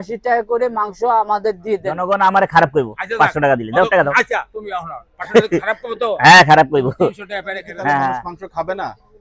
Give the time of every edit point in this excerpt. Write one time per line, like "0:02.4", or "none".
0:02.0
0:08.3